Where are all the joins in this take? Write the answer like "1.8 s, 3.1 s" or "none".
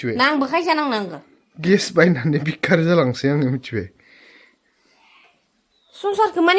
none